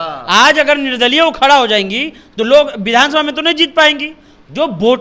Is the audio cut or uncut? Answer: uncut